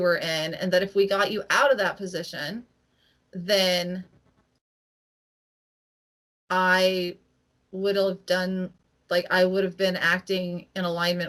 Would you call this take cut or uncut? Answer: uncut